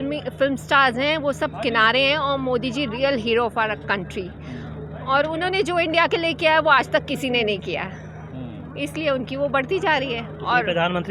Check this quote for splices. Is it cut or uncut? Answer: uncut